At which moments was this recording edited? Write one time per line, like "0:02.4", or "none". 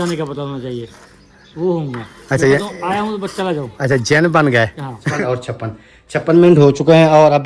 0:05.1